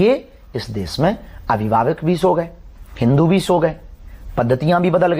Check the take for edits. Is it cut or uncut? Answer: uncut